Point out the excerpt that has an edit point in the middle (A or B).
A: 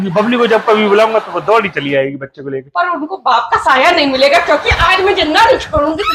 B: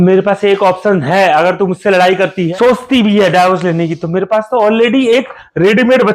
B